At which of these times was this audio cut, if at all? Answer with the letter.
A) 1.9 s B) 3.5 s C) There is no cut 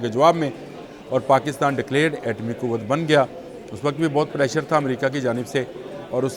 C